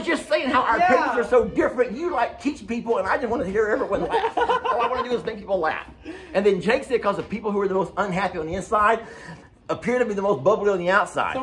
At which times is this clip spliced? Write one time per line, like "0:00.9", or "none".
none